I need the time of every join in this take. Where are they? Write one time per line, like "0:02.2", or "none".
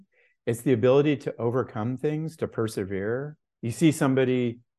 0:03.4